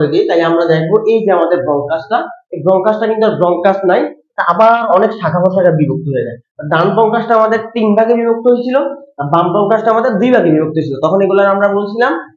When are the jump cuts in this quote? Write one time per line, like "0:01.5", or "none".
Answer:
none